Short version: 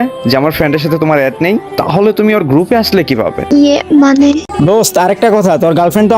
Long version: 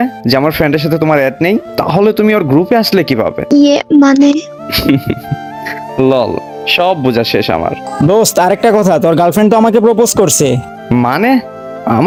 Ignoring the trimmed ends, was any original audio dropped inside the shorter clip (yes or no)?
yes